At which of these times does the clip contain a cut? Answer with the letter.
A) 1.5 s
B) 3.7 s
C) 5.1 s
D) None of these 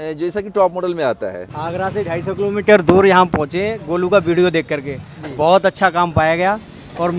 A